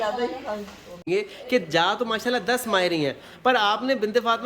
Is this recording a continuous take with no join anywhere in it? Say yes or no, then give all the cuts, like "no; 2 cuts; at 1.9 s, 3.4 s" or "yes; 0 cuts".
no; 1 cut; at 1.0 s